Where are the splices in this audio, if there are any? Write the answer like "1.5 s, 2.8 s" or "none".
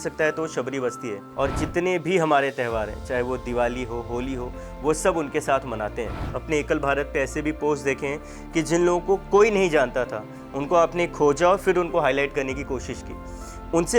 1.2 s, 6.3 s